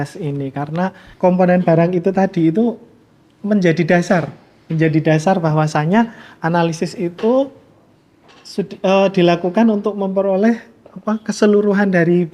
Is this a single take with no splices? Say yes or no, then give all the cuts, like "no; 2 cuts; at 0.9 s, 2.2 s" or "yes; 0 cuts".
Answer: no; 1 cut; at 1.0 s